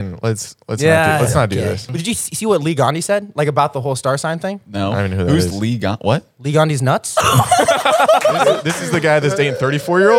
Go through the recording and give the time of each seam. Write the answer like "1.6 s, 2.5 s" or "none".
1.8 s, 8.7 s